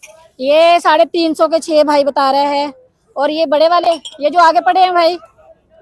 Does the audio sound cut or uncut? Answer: uncut